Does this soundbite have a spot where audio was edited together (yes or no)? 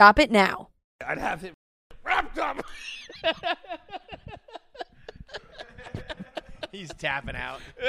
yes